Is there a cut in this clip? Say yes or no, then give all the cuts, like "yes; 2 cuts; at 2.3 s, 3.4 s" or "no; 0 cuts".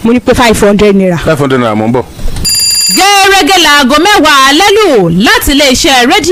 no; 0 cuts